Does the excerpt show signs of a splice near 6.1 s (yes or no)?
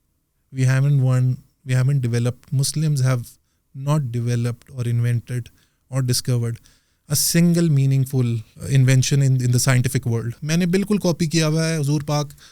no